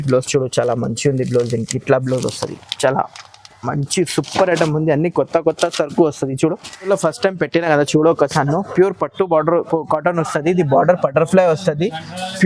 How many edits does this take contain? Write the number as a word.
one